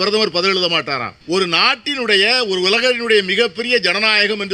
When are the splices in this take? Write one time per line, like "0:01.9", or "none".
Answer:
0:01.1